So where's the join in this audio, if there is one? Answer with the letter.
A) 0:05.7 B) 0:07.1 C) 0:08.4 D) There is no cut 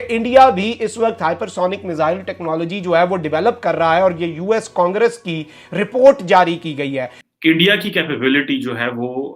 B